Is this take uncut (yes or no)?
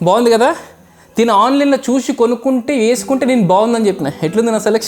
yes